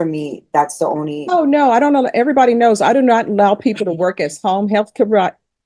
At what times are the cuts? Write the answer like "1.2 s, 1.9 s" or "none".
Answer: none